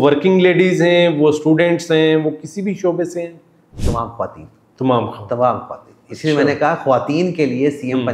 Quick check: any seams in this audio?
no; 0 cuts

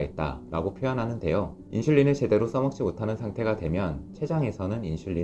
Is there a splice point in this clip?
no; 0 cuts

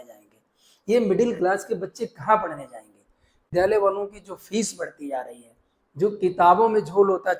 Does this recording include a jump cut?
yes; 1 cut; at 3.4 s

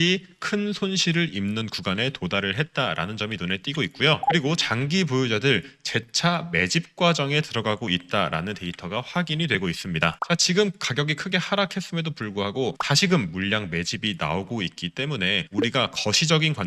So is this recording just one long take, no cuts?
no; 1 cut; at 10.2 s

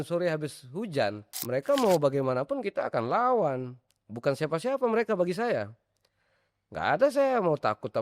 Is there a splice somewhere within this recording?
yes; 1 cut; at 1.3 s

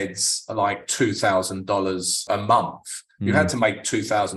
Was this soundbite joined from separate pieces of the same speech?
yes; 1 cut; at 2.2 s

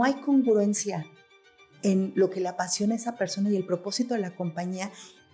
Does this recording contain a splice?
no; 0 cuts

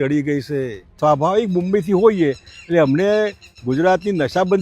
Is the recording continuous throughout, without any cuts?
no; 1 cut; at 0.9 s

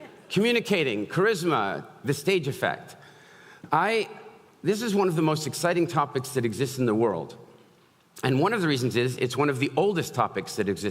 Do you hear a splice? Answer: no; 0 cuts

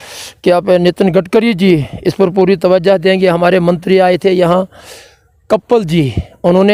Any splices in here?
no; 0 cuts

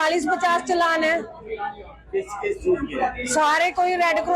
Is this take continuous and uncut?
yes; 0 cuts

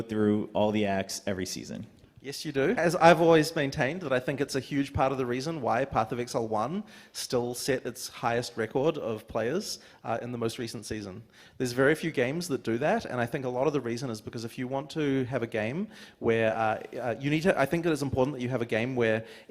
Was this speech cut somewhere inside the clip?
yes; 1 cut; at 2.8 s

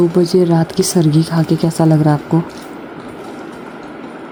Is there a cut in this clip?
no; 0 cuts

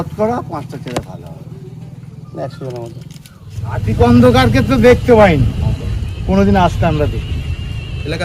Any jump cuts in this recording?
yes; 1 cut; at 3.8 s

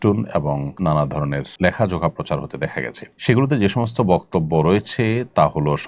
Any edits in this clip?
yes; 2 cuts; at 1.1 s, 3.0 s

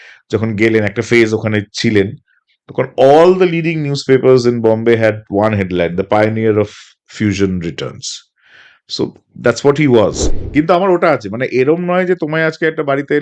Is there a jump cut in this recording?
yes; 1 cut; at 10.2 s

